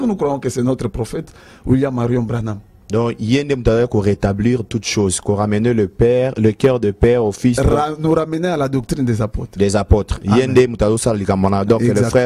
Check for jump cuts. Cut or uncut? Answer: uncut